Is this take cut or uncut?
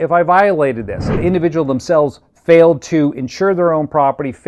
cut